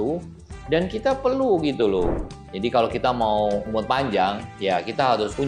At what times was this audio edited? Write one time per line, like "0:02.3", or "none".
0:02.2